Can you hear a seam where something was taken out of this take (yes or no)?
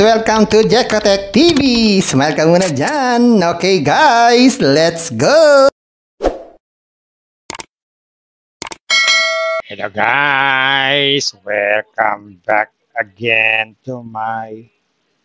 yes